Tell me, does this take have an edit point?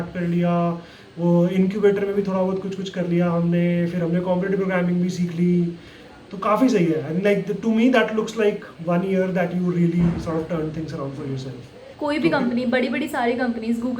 yes; 1 cut; at 11.9 s

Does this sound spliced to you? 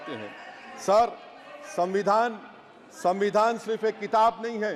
no; 0 cuts

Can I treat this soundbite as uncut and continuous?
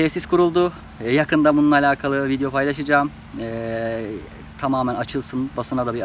yes; 0 cuts

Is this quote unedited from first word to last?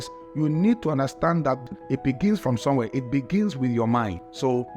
no; 1 cut; at 1.6 s

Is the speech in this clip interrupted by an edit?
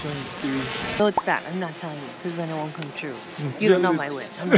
yes; 1 cut; at 1.0 s

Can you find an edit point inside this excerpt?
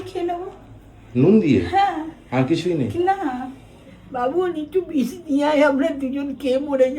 yes; 1 cut; at 4.0 s

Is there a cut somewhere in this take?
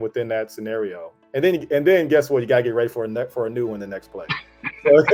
no; 0 cuts

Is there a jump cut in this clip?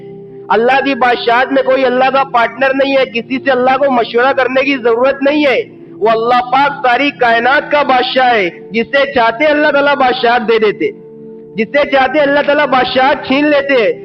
no; 0 cuts

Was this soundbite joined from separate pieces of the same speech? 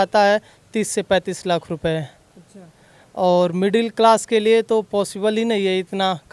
no; 0 cuts

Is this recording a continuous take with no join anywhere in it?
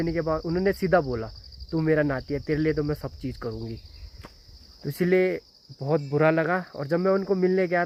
yes; 0 cuts

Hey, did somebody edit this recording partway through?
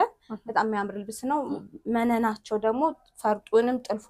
no; 0 cuts

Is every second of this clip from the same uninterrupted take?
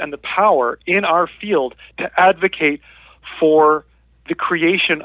yes; 0 cuts

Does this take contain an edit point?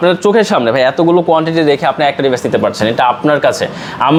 no; 0 cuts

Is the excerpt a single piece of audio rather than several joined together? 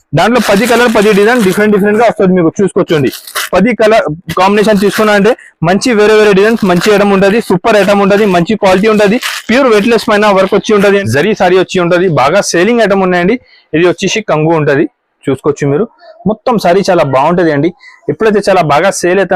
no; 1 cut; at 11.0 s

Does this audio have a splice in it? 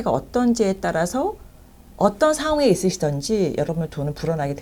no; 0 cuts

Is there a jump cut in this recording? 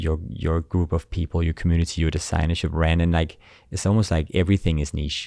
no; 0 cuts

